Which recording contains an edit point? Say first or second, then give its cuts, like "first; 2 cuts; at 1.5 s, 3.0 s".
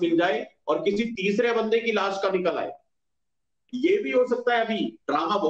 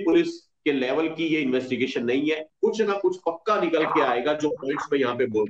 second; 1 cut; at 2.5 s